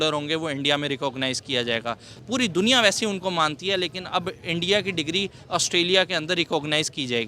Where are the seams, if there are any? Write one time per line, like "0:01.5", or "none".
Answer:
0:02.1

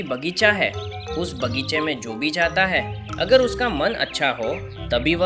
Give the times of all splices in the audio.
none

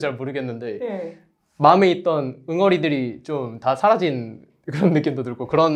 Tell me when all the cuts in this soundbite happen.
none

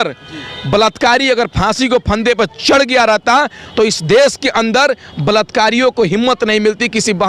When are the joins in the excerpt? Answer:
none

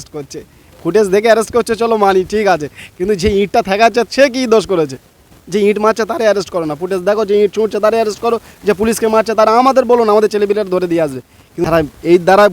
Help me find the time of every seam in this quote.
0:11.6

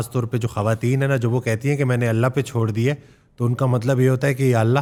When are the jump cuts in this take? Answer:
none

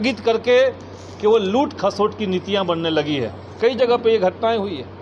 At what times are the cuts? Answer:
none

